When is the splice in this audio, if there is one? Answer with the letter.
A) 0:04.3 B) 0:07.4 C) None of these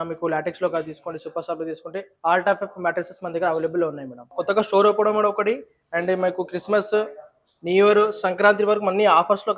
A